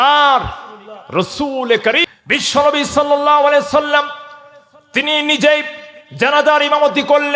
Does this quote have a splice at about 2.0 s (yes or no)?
yes